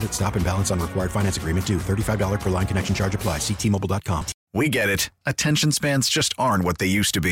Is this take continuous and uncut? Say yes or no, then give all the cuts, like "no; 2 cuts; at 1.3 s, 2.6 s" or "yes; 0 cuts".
no; 1 cut; at 4.4 s